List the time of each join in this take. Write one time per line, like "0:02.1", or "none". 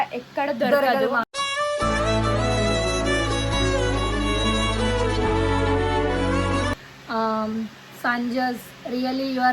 0:06.8